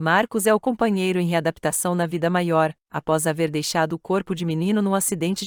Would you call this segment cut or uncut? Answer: uncut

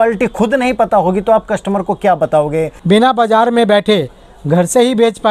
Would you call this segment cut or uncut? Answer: cut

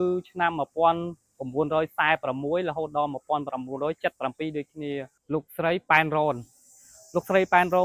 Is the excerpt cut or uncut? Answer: cut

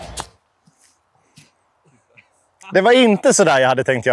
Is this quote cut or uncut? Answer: uncut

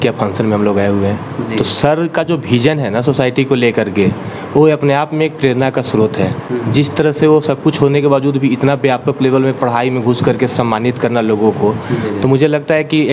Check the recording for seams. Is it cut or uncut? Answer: uncut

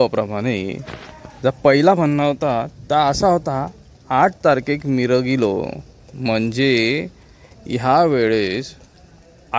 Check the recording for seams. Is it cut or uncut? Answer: uncut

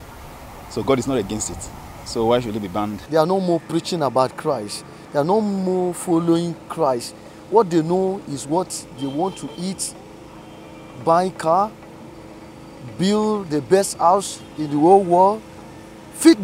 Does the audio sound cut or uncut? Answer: uncut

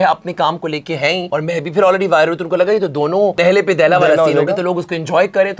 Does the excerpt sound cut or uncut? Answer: cut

